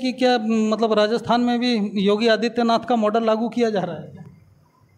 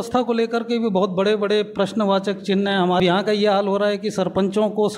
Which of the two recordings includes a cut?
second; 1 cut; at 3.0 s

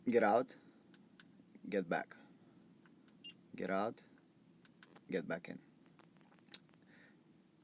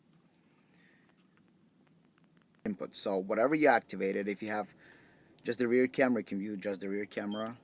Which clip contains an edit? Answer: second; 1 cut; at 2.7 s

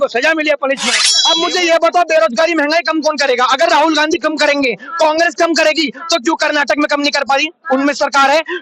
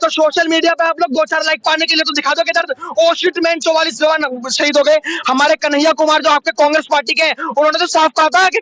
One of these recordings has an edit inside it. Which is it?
first; 1 cut; at 1.1 s

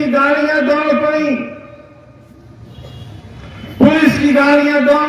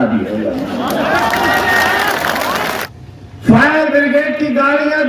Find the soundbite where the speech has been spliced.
second; 1 cut; at 2.8 s

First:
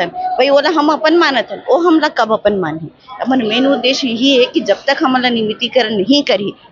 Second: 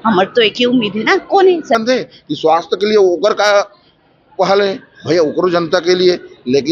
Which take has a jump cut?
second; 1 cut; at 1.7 s

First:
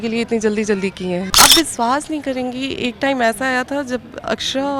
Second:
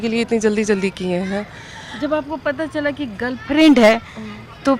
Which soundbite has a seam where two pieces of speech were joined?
first; 1 cut; at 1.3 s

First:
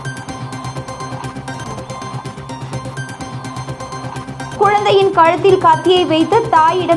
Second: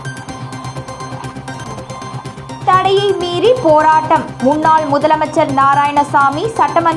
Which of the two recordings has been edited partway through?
first; 1 cut; at 2.6 s

